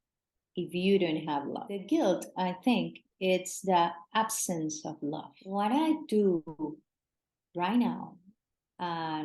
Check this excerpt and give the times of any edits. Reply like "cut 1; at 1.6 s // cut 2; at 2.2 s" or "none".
cut 1; at 1.7 s // cut 2; at 5.4 s

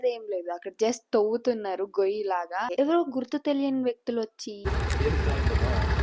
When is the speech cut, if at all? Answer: cut 1; at 2.7 s // cut 2; at 4.7 s

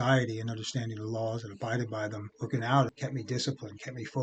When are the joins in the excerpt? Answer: cut 1; at 2.3 s

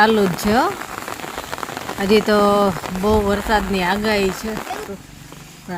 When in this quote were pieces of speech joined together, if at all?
cut 1; at 4.9 s

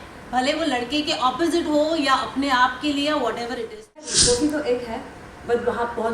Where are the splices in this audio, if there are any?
cut 1; at 4.0 s

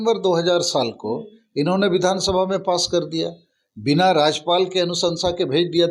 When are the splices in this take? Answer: none

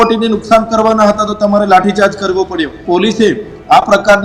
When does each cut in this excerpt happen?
cut 1; at 2.8 s

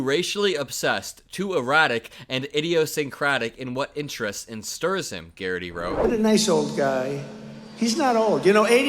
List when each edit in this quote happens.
cut 1; at 6.0 s

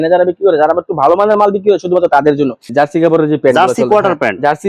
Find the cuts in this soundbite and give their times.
cut 1; at 2.6 s

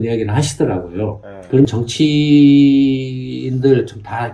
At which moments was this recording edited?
cut 1; at 1.7 s

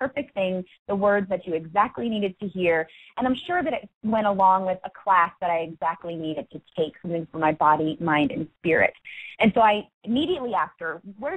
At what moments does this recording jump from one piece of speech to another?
cut 1; at 4.9 s

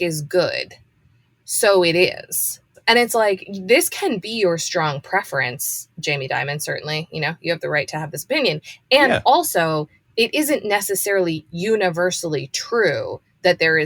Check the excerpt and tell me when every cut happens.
cut 1; at 2.5 s

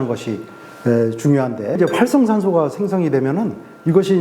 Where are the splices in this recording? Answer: cut 1; at 1.8 s

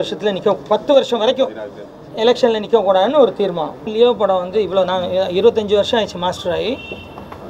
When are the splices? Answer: cut 1; at 3.9 s

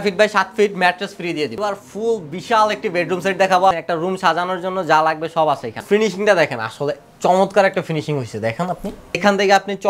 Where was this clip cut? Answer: cut 1; at 1.6 s // cut 2; at 3.7 s // cut 3; at 5.8 s // cut 4; at 9.2 s

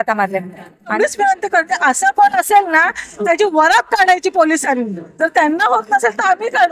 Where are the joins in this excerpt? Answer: cut 1; at 0.9 s

